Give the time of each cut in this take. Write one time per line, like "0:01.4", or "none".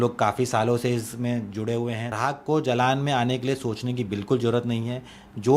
0:02.1